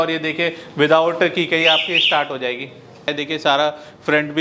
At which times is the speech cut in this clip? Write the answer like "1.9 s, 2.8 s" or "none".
3.1 s